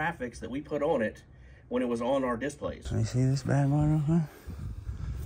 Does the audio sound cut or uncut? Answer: cut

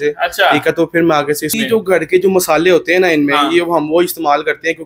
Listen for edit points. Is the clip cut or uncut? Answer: cut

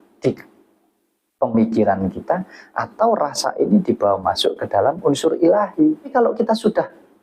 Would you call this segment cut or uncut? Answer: cut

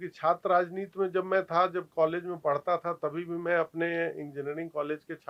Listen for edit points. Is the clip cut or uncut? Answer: uncut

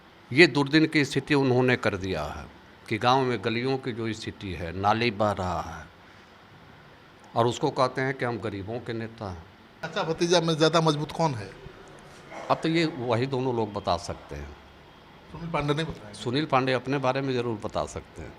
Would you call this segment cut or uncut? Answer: cut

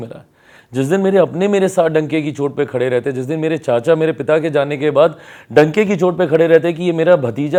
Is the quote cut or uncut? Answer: uncut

